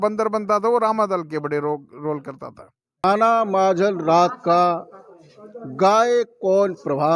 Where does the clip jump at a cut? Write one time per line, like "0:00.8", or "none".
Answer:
0:03.0